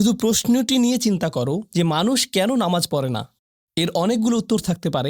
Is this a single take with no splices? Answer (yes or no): yes